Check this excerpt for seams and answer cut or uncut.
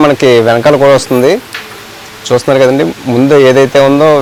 uncut